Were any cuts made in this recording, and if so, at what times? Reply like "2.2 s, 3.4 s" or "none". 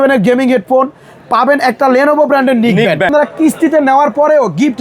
3.1 s